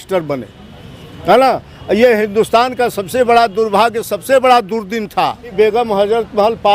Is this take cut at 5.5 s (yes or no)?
yes